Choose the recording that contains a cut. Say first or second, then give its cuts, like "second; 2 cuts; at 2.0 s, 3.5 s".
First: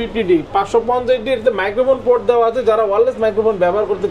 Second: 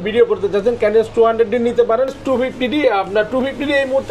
second; 1 cut; at 2.2 s